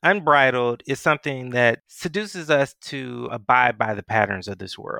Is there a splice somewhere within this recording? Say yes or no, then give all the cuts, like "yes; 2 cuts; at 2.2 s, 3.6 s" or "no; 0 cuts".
yes; 1 cut; at 3.3 s